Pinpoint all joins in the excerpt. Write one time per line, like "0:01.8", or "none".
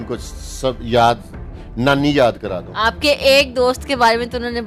none